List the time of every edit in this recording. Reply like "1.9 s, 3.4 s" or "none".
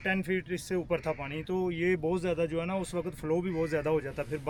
none